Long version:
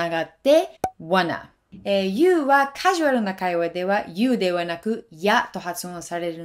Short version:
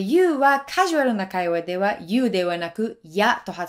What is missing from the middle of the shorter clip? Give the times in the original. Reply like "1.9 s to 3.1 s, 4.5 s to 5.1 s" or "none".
none